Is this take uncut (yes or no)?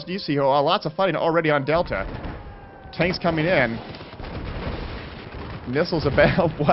no